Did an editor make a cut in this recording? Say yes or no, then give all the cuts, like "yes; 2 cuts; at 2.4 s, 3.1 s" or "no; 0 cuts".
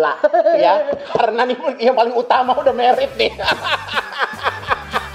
no; 0 cuts